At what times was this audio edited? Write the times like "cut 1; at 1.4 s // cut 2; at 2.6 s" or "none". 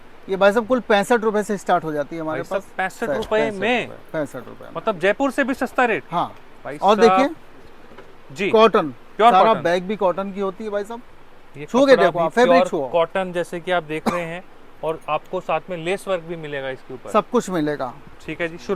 none